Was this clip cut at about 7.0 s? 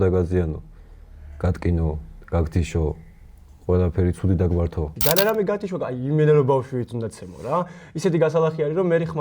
no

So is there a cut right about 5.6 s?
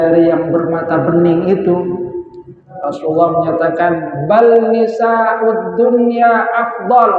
no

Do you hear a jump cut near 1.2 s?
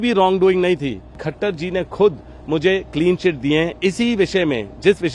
yes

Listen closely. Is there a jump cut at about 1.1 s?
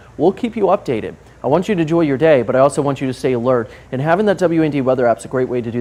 no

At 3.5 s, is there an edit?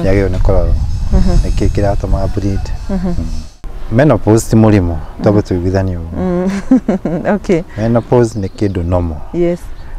yes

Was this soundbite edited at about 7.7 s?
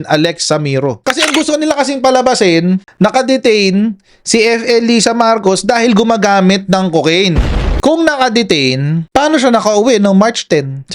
yes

